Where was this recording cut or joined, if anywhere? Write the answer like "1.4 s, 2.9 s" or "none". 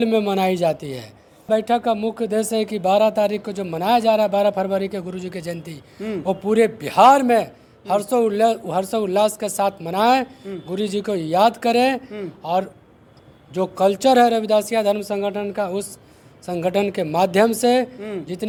none